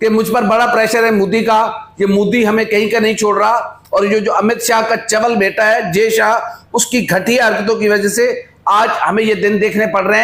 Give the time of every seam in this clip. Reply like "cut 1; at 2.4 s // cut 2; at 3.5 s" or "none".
none